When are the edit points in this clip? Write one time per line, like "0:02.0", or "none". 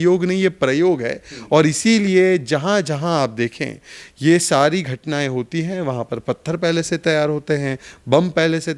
none